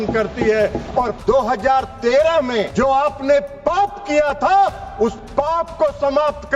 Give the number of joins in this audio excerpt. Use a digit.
2